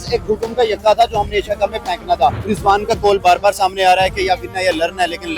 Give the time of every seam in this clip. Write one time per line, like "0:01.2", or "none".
0:02.4